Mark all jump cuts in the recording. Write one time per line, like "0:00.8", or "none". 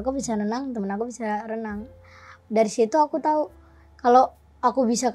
none